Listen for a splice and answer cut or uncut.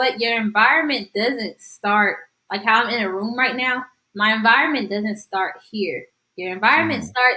uncut